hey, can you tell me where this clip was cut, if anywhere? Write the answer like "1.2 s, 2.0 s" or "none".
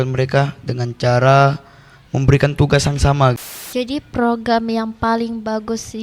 3.4 s